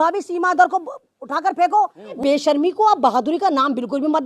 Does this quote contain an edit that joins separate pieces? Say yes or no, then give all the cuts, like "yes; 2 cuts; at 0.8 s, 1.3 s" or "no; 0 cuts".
yes; 1 cut; at 2.2 s